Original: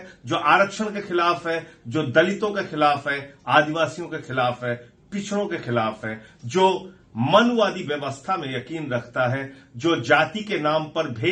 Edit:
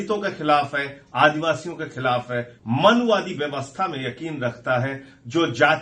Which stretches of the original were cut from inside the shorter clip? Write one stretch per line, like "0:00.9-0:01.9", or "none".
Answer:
0:04.9-0:07.0